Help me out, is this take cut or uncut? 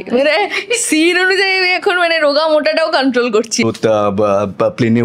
cut